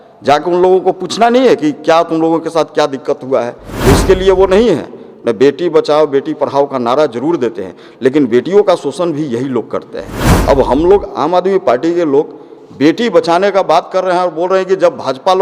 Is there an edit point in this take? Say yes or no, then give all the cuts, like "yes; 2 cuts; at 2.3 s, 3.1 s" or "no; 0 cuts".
yes; 1 cut; at 3.6 s